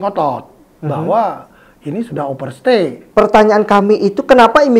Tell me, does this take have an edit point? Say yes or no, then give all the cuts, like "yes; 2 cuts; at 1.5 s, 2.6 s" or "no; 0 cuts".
yes; 1 cut; at 3.0 s